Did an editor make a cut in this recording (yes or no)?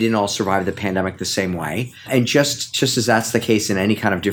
yes